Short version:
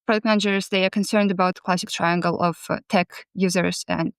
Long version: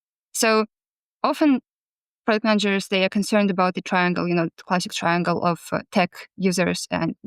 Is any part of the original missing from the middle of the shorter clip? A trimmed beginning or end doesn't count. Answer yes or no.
yes